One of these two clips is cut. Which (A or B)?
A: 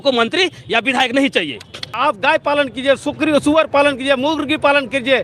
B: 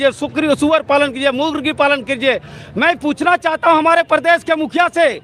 A